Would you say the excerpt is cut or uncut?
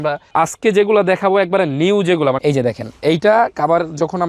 cut